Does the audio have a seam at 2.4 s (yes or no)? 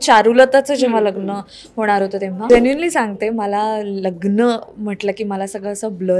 yes